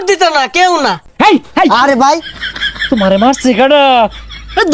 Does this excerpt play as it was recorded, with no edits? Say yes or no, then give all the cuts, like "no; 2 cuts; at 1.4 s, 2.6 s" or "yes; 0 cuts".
no; 1 cut; at 1.0 s